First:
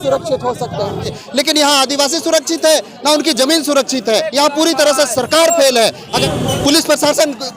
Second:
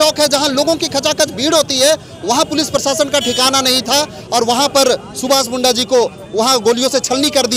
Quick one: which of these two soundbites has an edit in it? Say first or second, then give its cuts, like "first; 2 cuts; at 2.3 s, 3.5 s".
first; 3 cuts; at 1.2 s, 4.3 s, 6.2 s